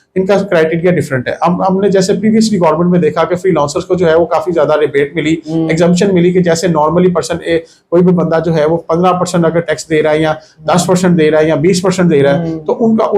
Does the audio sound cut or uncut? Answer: uncut